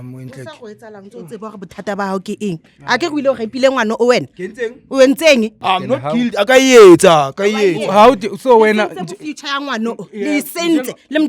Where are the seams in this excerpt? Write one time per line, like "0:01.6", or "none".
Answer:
0:05.6